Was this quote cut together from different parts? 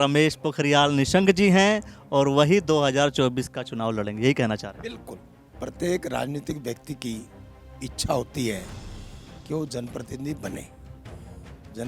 yes; 1 cut; at 5.2 s

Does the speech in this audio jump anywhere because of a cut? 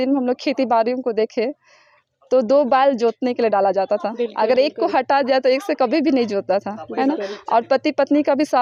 no; 0 cuts

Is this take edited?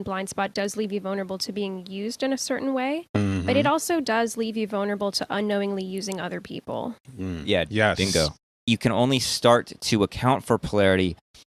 yes; 1 cut; at 8.7 s

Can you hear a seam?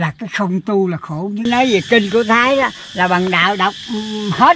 yes; 1 cut; at 1.4 s

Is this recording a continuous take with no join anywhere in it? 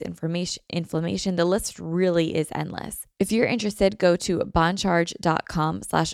no; 1 cut; at 3.0 s

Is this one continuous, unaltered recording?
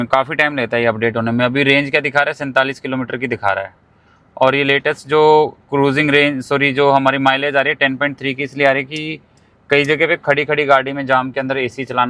yes; 0 cuts

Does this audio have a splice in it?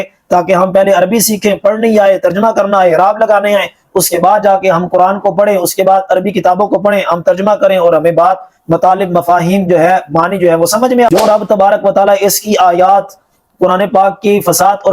yes; 1 cut; at 11.1 s

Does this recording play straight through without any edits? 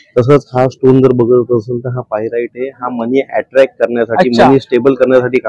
yes; 0 cuts

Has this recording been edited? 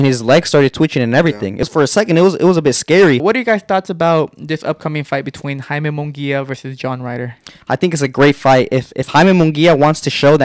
yes; 3 cuts; at 1.6 s, 3.2 s, 7.5 s

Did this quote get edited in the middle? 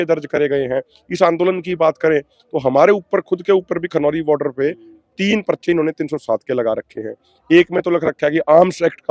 no; 0 cuts

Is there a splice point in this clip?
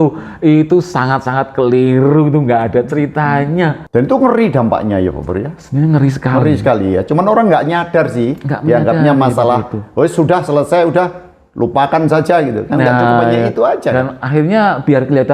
yes; 1 cut; at 3.8 s

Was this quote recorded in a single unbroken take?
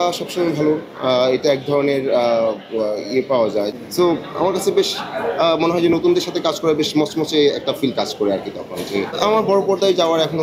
no; 2 cuts; at 3.7 s, 9.1 s

